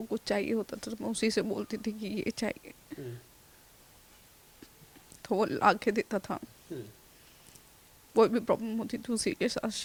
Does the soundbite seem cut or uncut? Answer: uncut